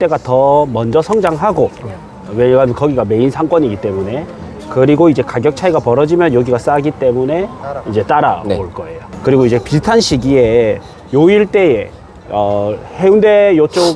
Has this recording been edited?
no; 0 cuts

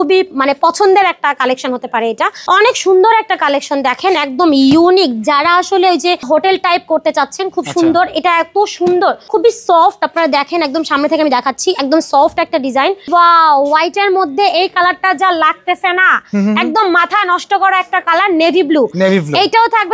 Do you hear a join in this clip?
yes; 4 cuts; at 2.4 s, 6.3 s, 9.2 s, 13.1 s

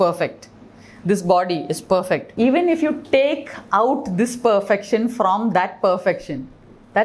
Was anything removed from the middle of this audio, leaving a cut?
yes; 1 cut; at 2.3 s

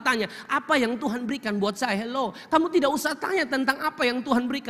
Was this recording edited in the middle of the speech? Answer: no; 0 cuts

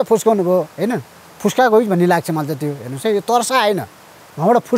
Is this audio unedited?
yes; 0 cuts

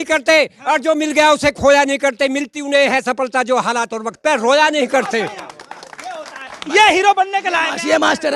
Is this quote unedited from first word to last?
yes; 0 cuts

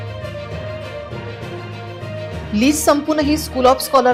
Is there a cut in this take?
no; 0 cuts

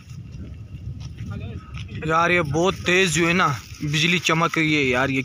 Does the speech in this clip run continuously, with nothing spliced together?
yes; 0 cuts

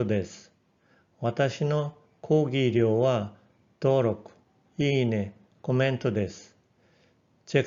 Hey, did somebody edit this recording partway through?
no; 0 cuts

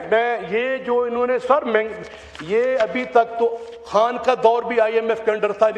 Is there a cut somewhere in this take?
no; 0 cuts

